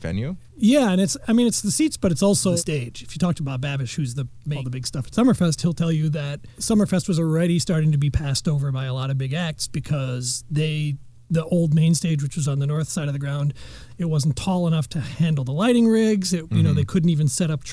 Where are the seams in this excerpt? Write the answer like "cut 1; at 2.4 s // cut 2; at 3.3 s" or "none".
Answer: cut 1; at 2.6 s // cut 2; at 4.6 s